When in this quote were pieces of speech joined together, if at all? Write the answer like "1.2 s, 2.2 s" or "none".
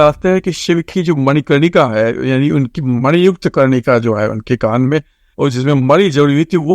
5.2 s